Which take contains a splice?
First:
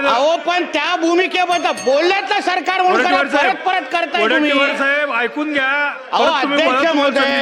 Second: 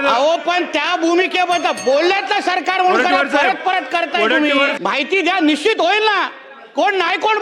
second; 1 cut; at 4.8 s

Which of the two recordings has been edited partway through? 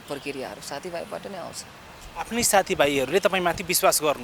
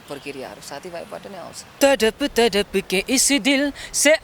second; 1 cut; at 1.7 s

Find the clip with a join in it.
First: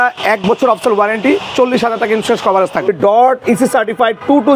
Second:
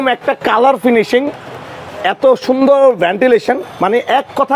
first; 1 cut; at 2.9 s

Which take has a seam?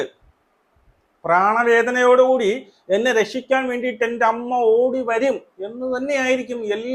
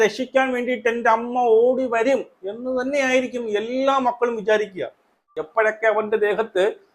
second; 1 cut; at 5.4 s

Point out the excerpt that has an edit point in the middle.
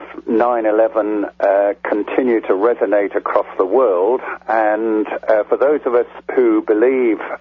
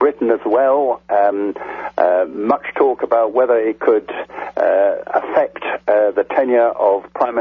first; 1 cut; at 3.5 s

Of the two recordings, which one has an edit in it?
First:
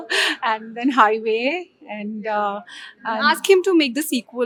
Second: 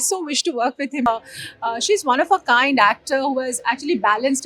second; 1 cut; at 1.1 s

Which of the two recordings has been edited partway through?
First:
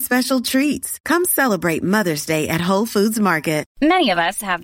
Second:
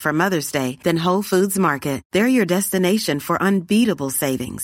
first; 1 cut; at 3.7 s

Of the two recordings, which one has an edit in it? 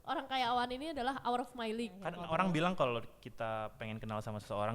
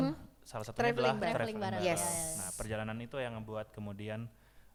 first; 1 cut; at 2.2 s

